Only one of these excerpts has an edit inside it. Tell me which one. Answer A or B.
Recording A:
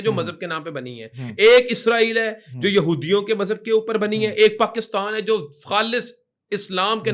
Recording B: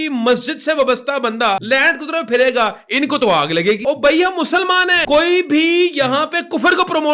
B